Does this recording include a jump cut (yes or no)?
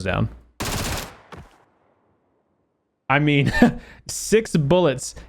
yes